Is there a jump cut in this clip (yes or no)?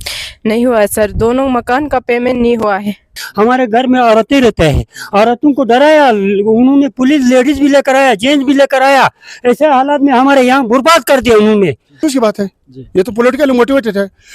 yes